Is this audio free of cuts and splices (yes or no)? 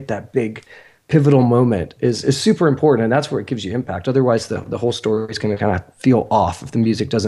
yes